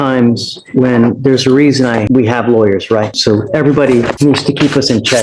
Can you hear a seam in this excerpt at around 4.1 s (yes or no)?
yes